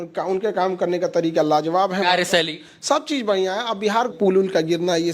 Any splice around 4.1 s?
yes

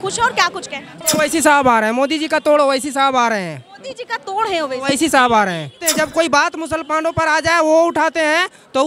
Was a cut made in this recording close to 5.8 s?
yes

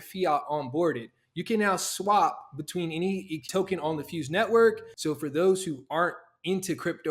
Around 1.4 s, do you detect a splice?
no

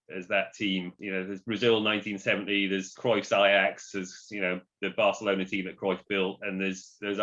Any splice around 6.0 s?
no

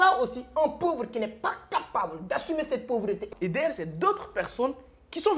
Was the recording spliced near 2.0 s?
no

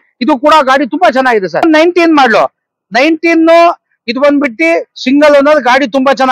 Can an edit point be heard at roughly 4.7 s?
no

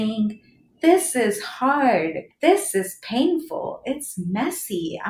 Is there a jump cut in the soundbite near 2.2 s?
yes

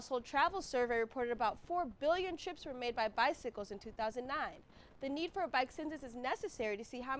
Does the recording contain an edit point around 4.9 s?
no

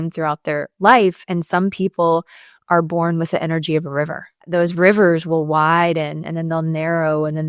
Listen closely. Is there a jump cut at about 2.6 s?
no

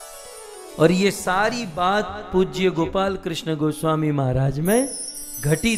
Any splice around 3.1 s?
no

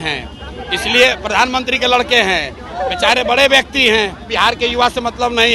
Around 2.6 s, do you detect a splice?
yes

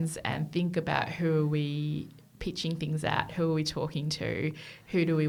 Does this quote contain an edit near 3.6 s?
no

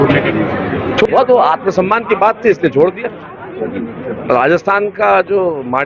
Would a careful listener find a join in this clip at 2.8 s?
no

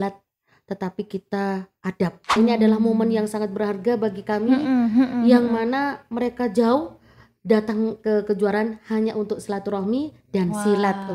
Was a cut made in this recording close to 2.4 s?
yes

